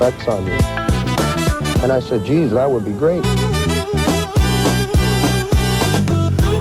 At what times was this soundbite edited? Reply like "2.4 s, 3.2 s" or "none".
none